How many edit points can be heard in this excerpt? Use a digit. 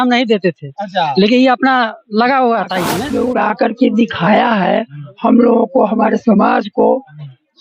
1